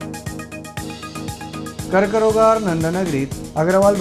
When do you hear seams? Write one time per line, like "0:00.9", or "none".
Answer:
0:01.3